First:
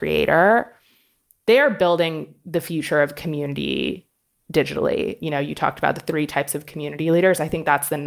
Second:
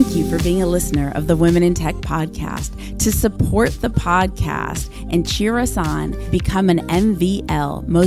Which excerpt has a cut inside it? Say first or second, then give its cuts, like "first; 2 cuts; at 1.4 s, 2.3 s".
first; 1 cut; at 5.2 s